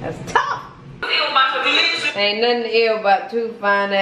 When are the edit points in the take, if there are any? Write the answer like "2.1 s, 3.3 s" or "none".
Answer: 1.0 s

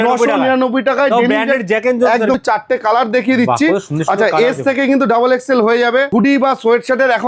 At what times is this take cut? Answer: 2.4 s, 6.1 s

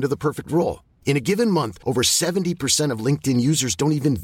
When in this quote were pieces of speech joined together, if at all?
none

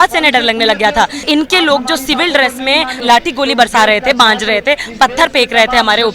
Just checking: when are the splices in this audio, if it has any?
1.2 s, 3.0 s

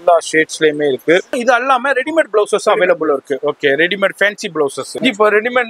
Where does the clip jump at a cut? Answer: 1.4 s, 4.8 s

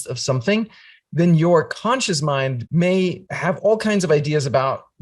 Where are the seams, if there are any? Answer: 2.6 s, 3.3 s

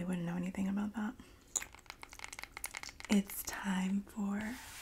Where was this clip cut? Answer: 1.8 s

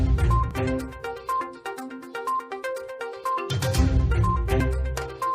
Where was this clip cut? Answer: 0.9 s

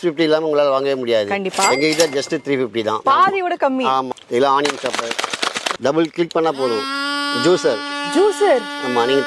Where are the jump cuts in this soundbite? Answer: 4.1 s, 5.8 s

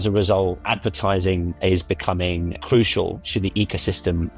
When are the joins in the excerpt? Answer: 2.6 s

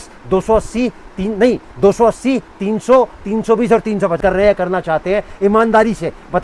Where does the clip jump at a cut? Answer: 4.2 s

